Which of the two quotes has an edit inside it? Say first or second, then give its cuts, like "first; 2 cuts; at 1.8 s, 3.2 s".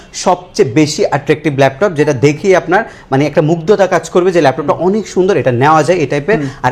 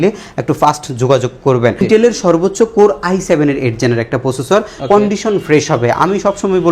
second; 2 cuts; at 1.8 s, 4.7 s